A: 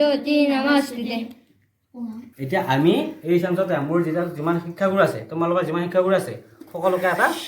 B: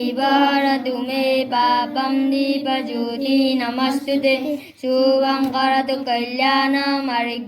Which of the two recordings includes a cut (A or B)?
A